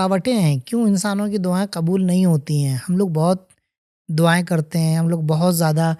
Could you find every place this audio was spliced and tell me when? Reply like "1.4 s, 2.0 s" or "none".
none

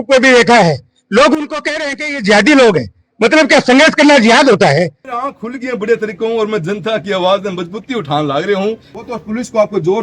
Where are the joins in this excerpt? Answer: 5.0 s, 8.9 s

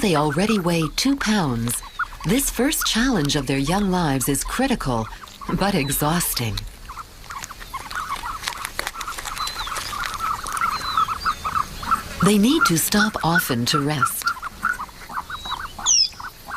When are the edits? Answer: 6.7 s

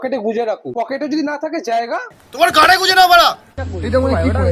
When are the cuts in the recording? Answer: 3.6 s

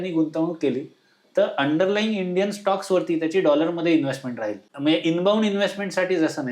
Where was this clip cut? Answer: 4.6 s

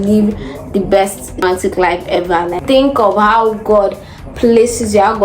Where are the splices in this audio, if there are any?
1.4 s, 2.5 s

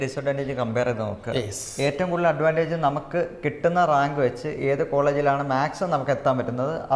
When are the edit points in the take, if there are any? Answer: none

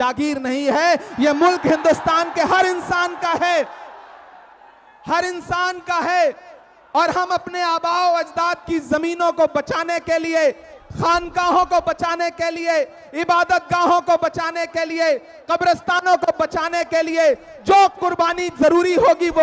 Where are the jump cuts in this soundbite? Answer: none

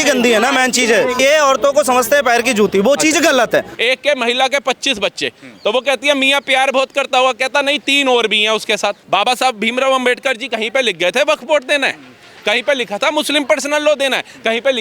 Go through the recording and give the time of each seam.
1.2 s, 3.7 s, 9.0 s

